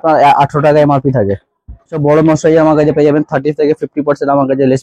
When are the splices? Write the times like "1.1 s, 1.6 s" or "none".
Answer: 2.0 s